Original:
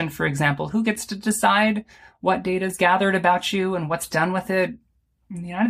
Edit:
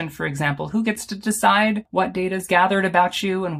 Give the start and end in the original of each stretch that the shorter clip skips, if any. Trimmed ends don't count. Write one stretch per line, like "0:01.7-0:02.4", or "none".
0:01.8-0:02.1